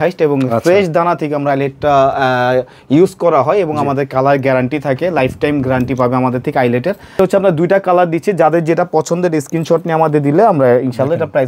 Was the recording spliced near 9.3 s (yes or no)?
no